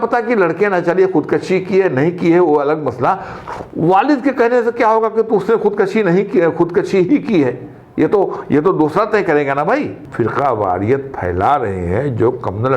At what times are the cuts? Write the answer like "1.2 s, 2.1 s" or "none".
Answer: 10.0 s